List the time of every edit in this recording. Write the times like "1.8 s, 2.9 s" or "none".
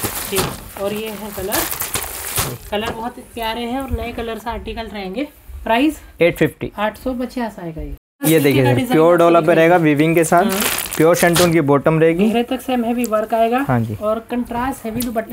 none